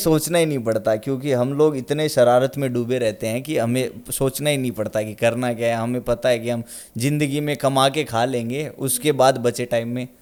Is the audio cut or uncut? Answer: uncut